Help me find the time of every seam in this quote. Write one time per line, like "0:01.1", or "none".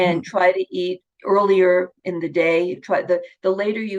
0:01.1